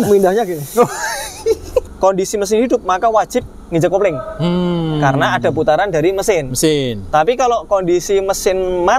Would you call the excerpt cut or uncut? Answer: cut